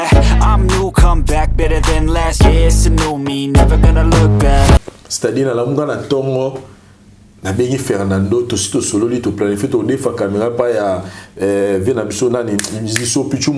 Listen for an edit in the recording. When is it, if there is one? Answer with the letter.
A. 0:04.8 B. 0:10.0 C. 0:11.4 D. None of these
A